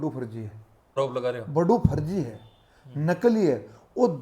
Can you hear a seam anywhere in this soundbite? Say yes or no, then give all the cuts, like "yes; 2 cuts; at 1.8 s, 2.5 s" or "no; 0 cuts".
yes; 1 cut; at 1.0 s